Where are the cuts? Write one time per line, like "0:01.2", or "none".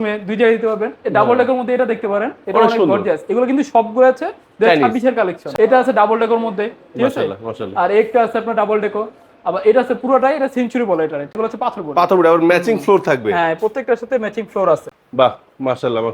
0:05.4
0:11.3
0:14.9